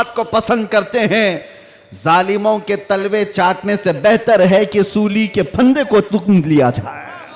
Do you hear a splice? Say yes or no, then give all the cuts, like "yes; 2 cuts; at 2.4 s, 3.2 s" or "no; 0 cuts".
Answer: no; 0 cuts